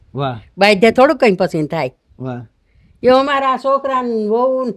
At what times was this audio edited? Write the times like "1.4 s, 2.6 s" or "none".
none

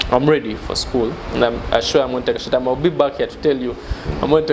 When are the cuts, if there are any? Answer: none

